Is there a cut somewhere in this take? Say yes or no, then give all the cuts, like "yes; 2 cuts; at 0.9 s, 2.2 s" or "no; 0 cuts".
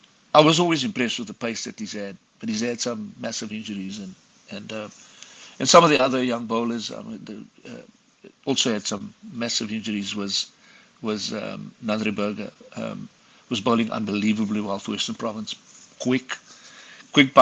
no; 0 cuts